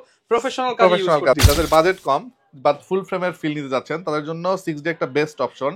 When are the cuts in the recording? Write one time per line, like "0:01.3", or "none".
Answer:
0:01.4

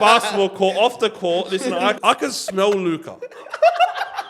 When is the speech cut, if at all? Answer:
0:02.0

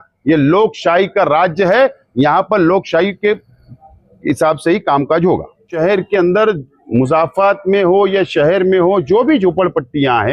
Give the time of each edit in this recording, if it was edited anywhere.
0:05.8

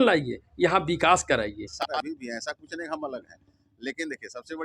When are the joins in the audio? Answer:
0:02.0

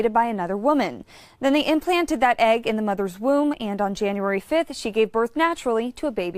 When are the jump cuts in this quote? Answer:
0:02.7

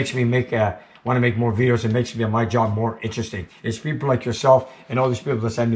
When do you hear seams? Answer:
none

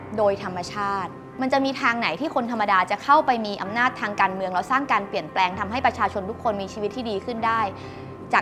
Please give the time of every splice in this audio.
0:01.2

